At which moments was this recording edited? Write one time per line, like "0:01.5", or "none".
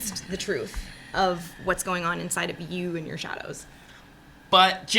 none